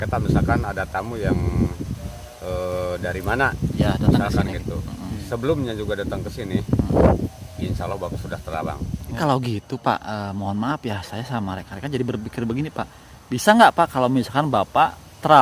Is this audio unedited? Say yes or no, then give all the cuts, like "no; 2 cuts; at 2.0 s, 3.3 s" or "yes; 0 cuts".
no; 1 cut; at 9.2 s